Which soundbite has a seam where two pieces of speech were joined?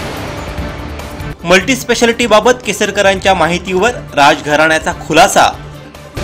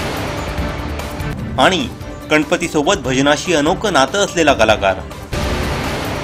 second; 2 cuts; at 1.4 s, 5.2 s

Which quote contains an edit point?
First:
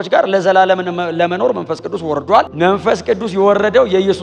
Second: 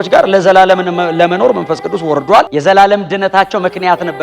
second; 1 cut; at 2.5 s

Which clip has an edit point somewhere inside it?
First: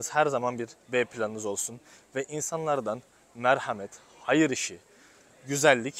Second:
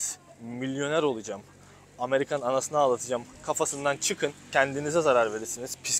second; 1 cut; at 4.5 s

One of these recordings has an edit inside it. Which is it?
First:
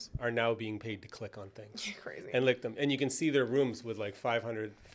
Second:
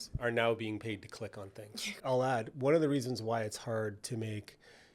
second; 1 cut; at 1.9 s

